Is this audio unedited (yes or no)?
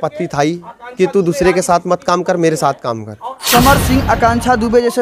no